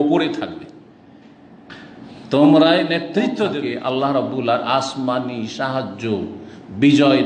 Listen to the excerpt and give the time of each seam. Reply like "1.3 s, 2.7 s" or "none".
3.9 s